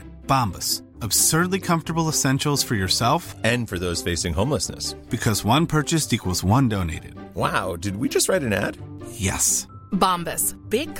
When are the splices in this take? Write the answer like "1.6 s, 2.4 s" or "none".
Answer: none